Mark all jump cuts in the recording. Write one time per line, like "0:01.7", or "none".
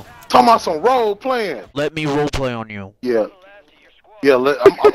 0:01.6